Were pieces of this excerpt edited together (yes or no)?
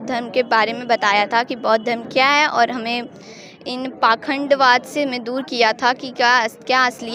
no